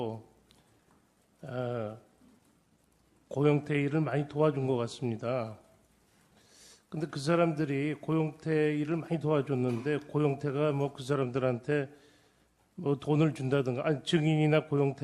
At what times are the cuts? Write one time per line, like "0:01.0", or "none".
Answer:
0:10.8